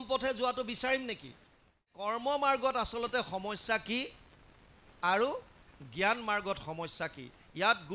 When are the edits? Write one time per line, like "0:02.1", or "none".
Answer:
0:02.0